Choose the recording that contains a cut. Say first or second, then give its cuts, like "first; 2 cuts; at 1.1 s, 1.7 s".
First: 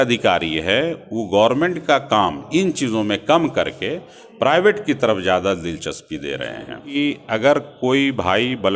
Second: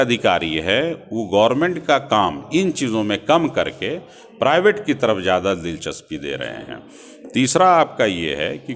first; 1 cut; at 6.8 s